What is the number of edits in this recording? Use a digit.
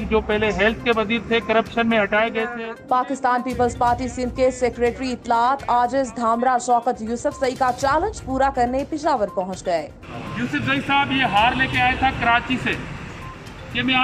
2